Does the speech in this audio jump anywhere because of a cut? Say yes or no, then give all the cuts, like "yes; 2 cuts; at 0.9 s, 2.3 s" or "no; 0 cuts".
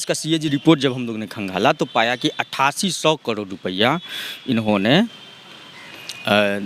no; 0 cuts